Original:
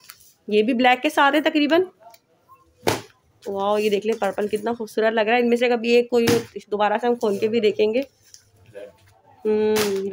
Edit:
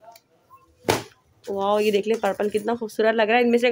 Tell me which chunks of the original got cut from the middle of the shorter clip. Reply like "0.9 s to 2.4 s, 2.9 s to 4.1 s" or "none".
none

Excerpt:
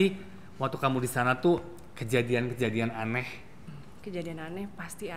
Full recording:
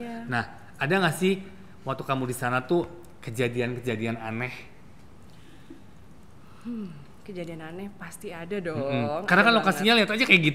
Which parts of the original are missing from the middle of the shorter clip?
5.1 s to 7.1 s

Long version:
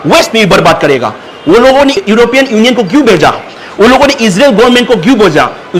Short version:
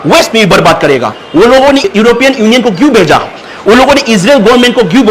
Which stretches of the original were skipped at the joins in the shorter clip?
1.2 s to 1.3 s

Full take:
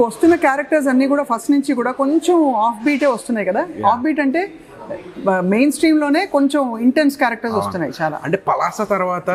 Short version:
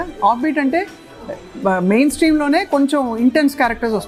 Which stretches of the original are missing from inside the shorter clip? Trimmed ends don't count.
none

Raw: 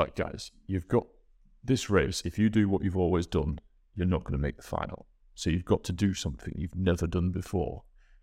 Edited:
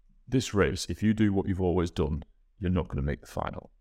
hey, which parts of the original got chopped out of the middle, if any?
none

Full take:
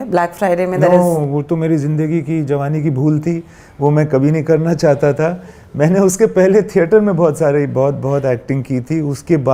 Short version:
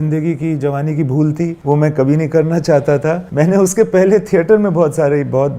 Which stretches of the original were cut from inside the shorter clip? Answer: 3.4 s to 3.7 s, 5.4 s to 5.7 s

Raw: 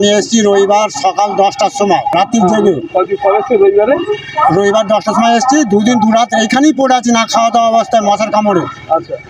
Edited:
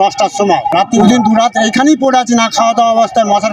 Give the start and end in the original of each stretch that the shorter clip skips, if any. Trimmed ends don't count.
2.4 s to 5.8 s

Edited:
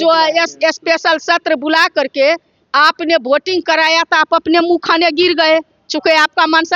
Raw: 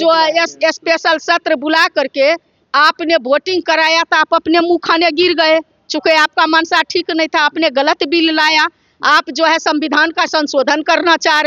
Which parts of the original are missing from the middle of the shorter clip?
none

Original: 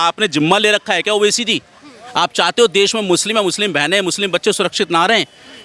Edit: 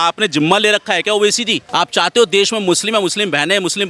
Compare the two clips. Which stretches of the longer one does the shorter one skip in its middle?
1.5 s to 2.0 s

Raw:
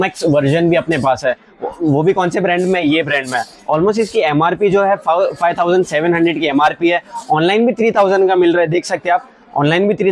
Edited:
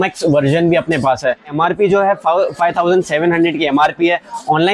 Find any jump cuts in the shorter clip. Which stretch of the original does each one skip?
1.5 s to 4.3 s

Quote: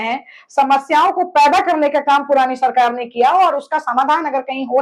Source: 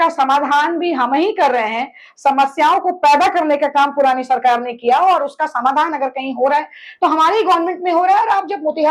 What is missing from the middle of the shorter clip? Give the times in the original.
none

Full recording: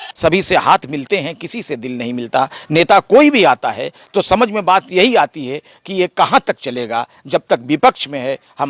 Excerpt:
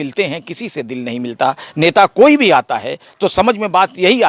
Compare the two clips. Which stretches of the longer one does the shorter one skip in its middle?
none

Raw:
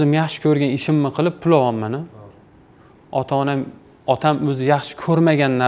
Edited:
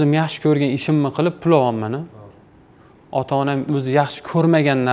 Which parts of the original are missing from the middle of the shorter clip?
3.7 s to 4.4 s

